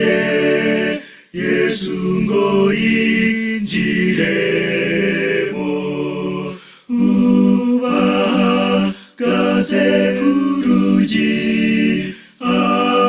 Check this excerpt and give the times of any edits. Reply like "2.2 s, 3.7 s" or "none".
11.8 s